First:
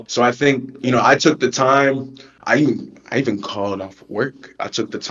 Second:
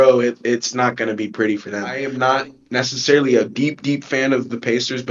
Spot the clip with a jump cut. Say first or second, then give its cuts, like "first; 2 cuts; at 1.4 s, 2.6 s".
second; 1 cut; at 2.1 s